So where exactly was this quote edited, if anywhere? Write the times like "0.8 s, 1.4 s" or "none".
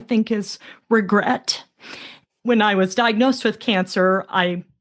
none